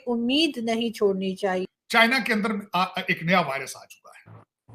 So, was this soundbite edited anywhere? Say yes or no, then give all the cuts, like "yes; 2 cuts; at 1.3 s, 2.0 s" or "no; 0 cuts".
yes; 1 cut; at 1.7 s